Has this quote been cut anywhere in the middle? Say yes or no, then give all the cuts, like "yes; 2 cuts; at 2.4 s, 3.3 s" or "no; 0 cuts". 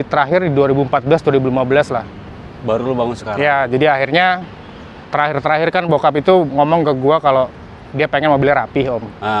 no; 0 cuts